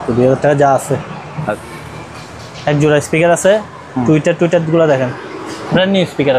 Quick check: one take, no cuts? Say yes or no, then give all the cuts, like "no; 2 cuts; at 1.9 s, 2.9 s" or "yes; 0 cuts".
no; 1 cut; at 1.6 s